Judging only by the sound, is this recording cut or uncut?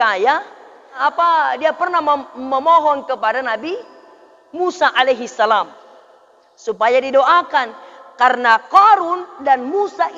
cut